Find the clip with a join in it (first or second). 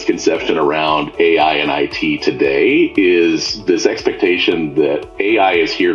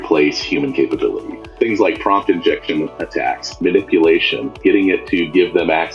second